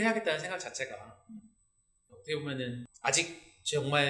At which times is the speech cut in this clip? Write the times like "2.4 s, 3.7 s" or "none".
2.9 s